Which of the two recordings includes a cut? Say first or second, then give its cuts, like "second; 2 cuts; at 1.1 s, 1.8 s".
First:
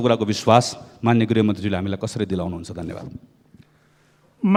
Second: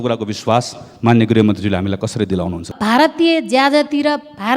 second; 1 cut; at 2.7 s